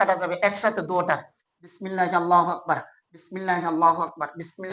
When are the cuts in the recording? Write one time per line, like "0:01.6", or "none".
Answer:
none